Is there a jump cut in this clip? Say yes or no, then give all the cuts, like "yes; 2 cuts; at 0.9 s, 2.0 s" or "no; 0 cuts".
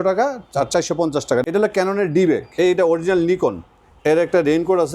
yes; 2 cuts; at 1.5 s, 2.5 s